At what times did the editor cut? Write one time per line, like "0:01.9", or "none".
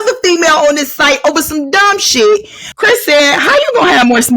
0:02.6